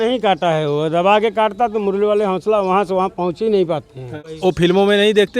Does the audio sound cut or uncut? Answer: cut